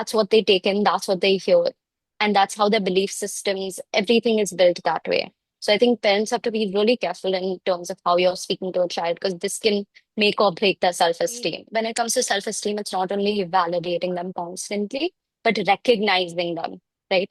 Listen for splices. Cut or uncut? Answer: cut